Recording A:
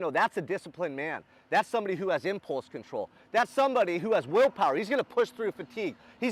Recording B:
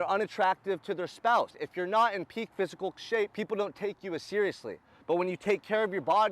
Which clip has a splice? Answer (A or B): B